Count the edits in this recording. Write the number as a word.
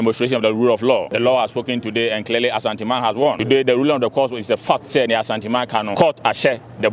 three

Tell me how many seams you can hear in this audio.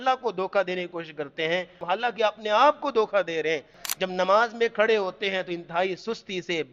two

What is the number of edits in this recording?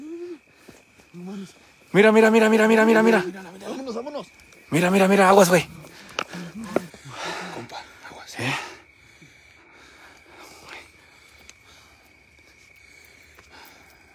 one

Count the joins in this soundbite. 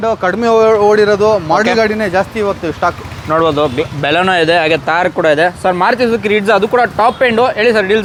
zero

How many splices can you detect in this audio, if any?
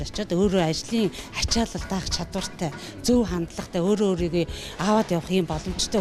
zero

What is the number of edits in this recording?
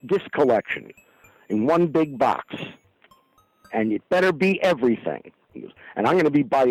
zero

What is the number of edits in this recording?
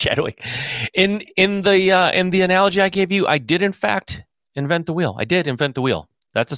zero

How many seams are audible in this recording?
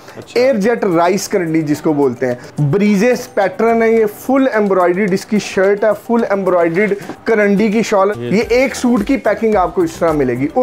three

